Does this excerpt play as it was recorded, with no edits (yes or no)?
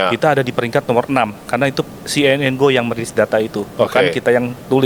yes